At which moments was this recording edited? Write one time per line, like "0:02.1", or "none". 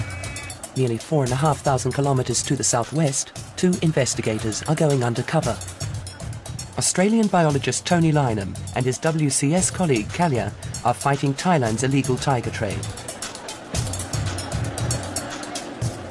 0:08.4

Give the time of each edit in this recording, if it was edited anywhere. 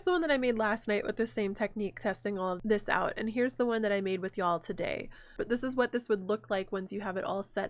0:02.6
0:05.3

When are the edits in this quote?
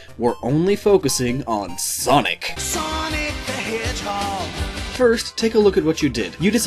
0:03.0

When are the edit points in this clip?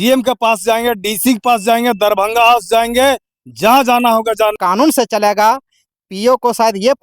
0:04.6

